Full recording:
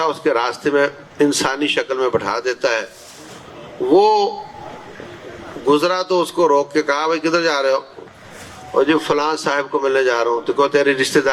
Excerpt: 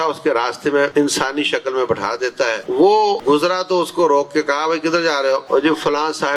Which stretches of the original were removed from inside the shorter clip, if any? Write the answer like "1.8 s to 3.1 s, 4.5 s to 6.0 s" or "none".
0.9 s to 1.1 s, 2.9 s to 3.7 s, 4.3 s to 5.6 s, 7.8 s to 8.7 s